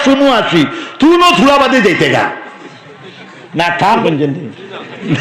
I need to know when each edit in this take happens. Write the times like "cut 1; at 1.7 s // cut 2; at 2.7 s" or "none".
cut 1; at 4.0 s